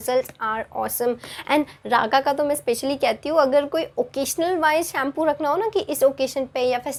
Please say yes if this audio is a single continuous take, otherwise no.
yes